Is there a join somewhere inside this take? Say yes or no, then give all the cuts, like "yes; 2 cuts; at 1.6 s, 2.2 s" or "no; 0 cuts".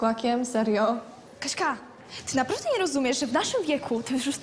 no; 0 cuts